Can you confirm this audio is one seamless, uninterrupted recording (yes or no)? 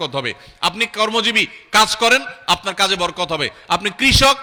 yes